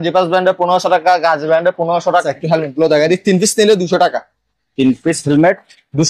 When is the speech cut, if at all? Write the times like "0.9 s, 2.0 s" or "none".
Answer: 2.2 s